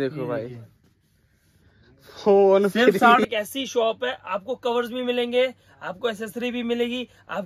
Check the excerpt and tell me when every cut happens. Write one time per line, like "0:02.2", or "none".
0:03.2